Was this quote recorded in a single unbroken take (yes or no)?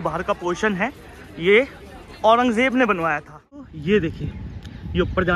no